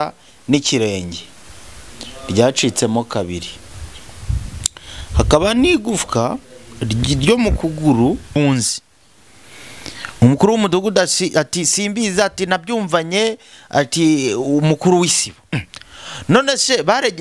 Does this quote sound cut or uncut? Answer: cut